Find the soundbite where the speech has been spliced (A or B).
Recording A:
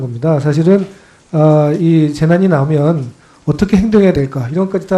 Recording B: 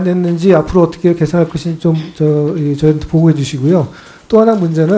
B